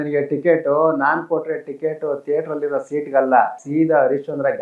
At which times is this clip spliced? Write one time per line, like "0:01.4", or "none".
0:03.6